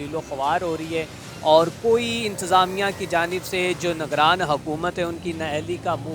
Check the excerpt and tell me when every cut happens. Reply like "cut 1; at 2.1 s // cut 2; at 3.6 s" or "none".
none